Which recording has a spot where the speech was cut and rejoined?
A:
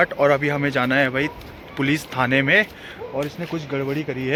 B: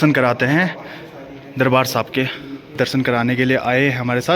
B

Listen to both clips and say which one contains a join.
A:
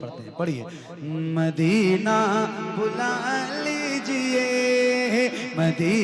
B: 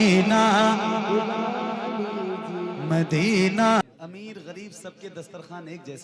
B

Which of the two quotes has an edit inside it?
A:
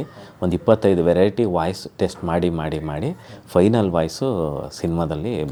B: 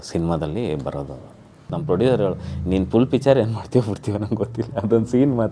B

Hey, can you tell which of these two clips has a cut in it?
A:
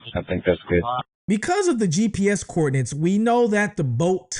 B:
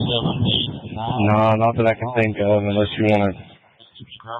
A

